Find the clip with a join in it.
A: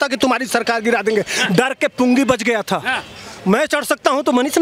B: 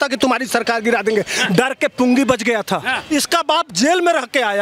B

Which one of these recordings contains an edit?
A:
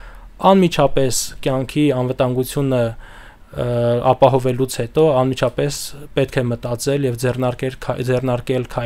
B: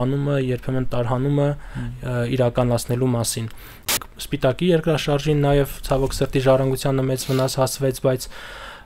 B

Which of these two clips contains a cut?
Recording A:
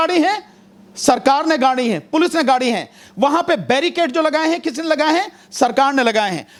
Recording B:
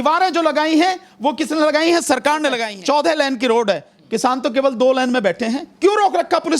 B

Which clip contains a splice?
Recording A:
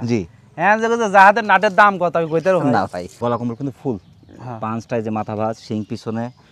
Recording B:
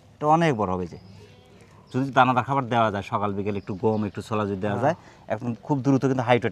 A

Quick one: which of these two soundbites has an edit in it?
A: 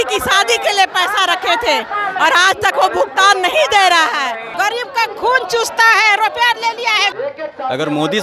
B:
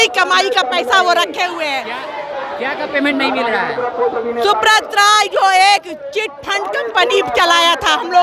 A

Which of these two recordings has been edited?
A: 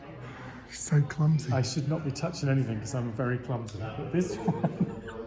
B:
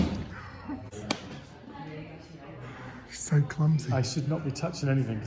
B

